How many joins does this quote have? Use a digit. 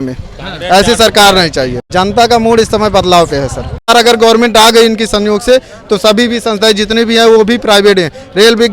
2